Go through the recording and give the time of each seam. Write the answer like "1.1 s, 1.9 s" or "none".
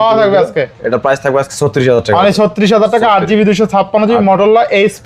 none